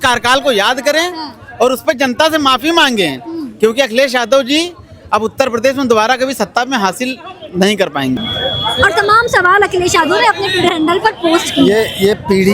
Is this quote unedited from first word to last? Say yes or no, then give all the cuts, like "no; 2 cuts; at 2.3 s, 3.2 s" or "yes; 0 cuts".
no; 1 cut; at 8.2 s